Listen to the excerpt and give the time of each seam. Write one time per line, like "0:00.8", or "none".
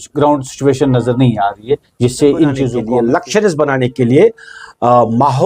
0:02.8